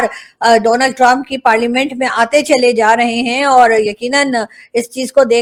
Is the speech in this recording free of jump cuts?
yes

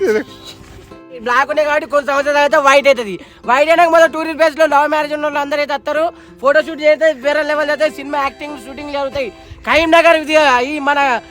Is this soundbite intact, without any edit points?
no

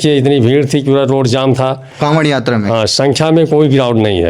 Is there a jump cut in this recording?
no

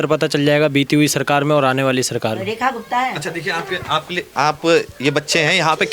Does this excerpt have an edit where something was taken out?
no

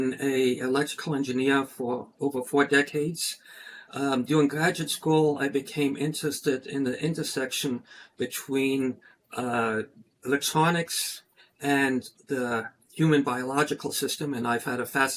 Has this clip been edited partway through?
no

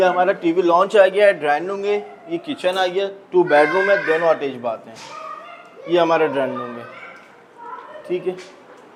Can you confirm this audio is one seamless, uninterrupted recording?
yes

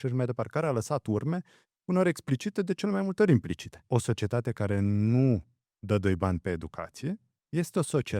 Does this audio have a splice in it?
yes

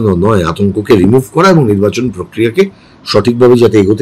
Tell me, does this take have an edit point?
no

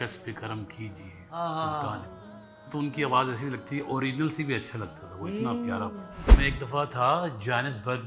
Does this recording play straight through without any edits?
no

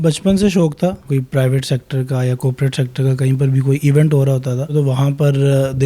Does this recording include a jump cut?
yes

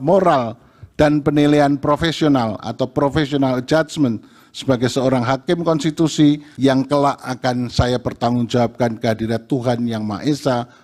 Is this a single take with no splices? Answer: no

